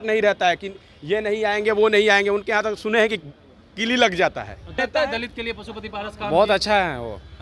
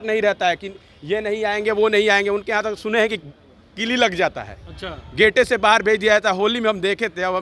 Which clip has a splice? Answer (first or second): first